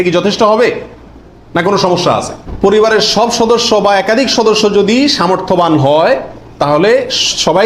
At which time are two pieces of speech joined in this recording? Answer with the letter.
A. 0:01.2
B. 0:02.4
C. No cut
B